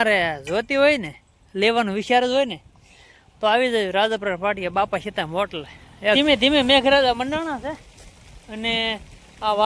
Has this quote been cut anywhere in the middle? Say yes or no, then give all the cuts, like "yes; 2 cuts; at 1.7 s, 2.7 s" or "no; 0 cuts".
yes; 1 cut; at 6.2 s